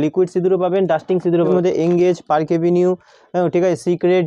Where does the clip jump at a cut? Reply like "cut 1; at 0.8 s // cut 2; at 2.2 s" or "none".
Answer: cut 1; at 1.5 s

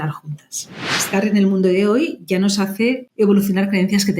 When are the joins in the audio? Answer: cut 1; at 0.9 s // cut 2; at 3.1 s

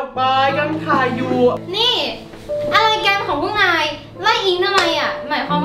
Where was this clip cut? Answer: cut 1; at 1.6 s

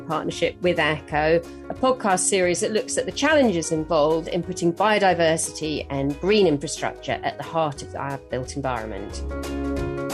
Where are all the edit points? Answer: cut 1; at 9.1 s

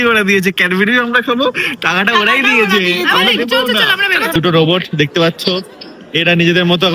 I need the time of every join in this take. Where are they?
cut 1; at 4.3 s

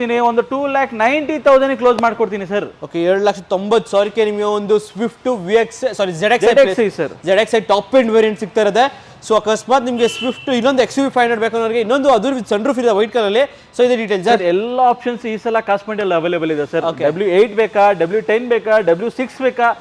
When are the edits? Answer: none

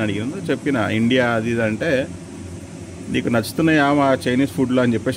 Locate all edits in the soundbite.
none

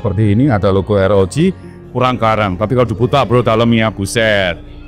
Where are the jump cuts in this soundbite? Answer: cut 1; at 1.7 s

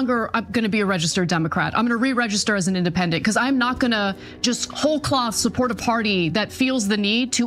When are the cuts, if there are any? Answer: none

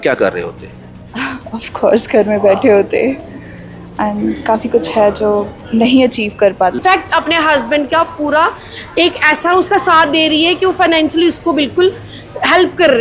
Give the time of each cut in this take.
cut 1; at 6.8 s

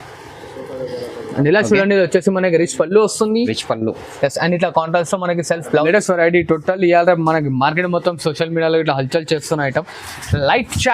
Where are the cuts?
cut 1; at 5.8 s

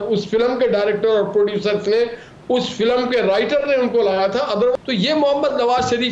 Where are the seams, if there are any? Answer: cut 1; at 4.7 s

